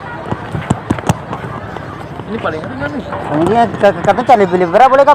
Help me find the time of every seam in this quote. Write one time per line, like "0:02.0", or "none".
none

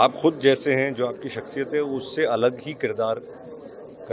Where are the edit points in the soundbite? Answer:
none

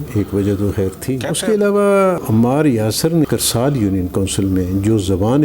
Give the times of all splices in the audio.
0:01.2
0:02.2
0:03.3

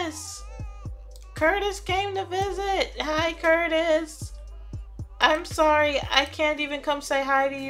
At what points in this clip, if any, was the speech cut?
none

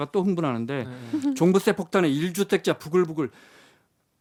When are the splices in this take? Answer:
none

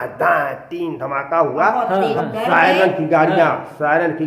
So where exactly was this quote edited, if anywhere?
0:02.2

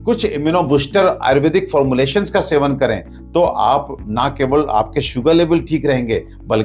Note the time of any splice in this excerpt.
none

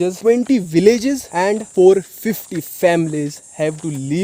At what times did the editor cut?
none

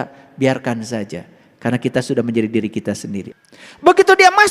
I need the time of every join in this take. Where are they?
0:03.3

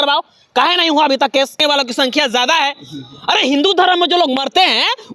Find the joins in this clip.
0:01.6

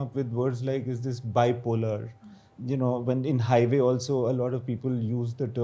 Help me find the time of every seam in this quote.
none

